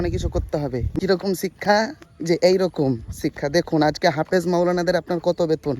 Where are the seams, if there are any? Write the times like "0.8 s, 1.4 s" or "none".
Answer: 1.0 s